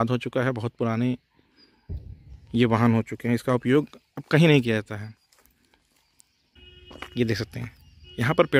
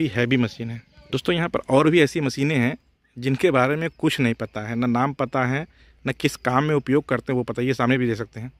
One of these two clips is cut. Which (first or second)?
first